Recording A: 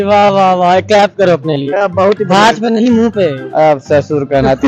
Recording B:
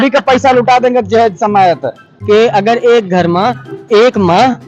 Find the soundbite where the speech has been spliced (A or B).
B